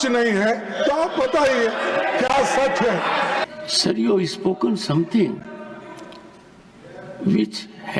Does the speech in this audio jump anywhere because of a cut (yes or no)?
yes